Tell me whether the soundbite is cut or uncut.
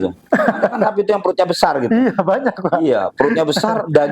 uncut